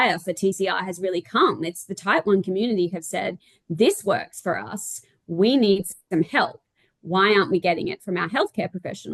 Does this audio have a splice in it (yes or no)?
no